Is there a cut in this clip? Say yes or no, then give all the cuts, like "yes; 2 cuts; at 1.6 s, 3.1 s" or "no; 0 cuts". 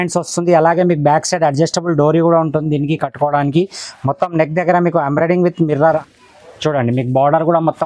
yes; 1 cut; at 5.8 s